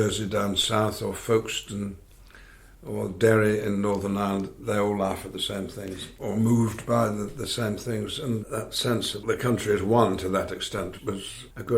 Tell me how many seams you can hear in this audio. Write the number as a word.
two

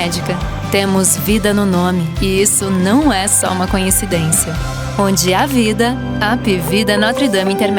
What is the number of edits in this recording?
zero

